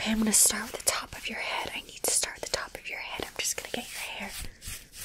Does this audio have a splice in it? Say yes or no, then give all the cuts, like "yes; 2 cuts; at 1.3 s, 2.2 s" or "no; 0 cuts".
no; 0 cuts